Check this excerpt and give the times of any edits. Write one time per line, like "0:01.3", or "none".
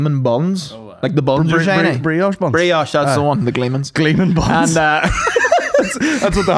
none